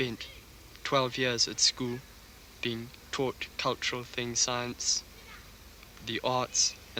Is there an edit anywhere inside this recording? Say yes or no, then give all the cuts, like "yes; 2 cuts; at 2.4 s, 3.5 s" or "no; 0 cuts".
no; 0 cuts